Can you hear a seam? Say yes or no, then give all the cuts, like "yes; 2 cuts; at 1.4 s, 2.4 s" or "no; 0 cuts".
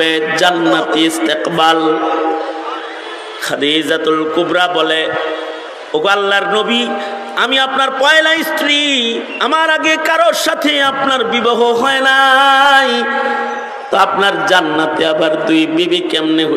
no; 0 cuts